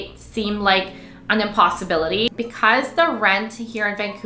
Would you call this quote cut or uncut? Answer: cut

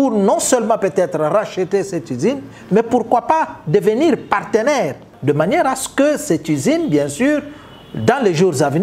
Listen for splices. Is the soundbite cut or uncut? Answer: cut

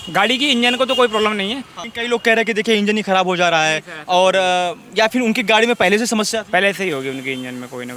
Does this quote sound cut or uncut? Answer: cut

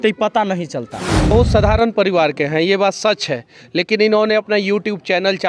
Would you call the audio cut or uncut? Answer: cut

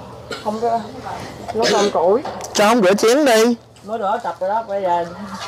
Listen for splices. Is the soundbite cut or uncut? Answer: uncut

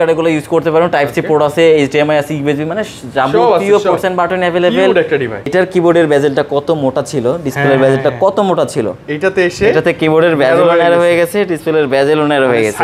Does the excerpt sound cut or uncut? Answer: cut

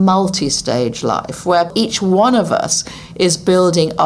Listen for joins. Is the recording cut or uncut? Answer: cut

